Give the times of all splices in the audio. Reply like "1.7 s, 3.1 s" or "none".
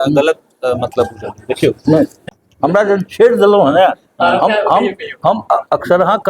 2.2 s